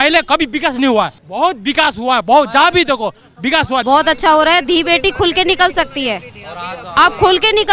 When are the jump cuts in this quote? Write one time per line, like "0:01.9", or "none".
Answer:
0:01.2
0:03.8